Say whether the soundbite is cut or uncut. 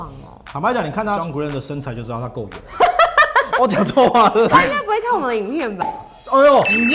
cut